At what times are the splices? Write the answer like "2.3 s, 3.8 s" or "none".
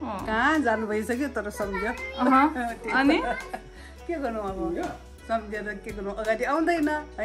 none